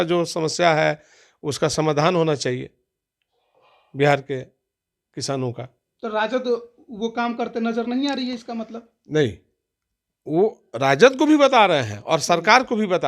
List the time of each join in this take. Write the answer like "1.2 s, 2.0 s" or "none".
none